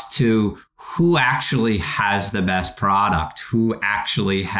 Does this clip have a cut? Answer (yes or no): no